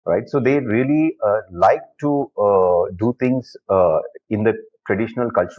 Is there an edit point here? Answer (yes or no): no